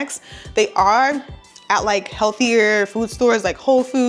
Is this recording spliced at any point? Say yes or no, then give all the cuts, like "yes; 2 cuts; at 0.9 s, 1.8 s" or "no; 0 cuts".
no; 0 cuts